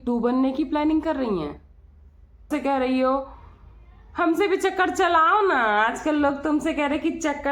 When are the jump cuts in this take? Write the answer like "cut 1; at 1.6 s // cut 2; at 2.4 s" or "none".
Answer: cut 1; at 2.5 s